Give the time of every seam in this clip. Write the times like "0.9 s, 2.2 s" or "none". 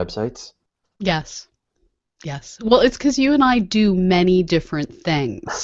none

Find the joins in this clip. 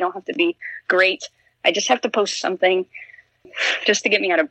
3.5 s

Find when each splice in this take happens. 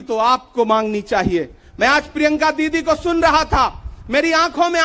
none

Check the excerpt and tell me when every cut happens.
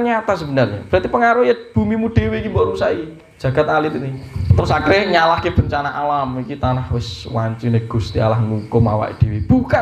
4.6 s

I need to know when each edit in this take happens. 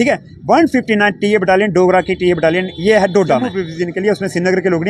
3.6 s

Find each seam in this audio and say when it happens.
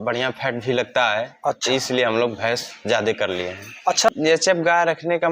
4.1 s

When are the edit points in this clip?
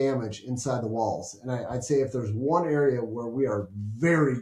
none

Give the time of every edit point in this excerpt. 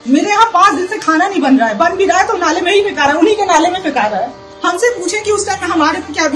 4.4 s

